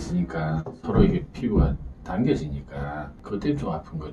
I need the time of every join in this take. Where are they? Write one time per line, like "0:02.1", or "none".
0:03.1